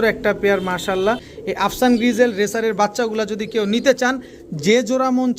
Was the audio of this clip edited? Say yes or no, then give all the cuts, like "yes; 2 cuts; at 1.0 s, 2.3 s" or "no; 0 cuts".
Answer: yes; 1 cut; at 1.3 s